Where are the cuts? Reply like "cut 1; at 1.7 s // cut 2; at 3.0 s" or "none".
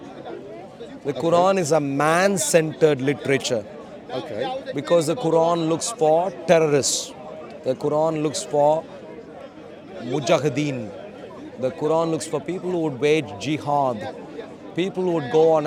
none